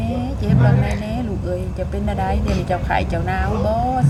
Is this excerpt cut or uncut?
uncut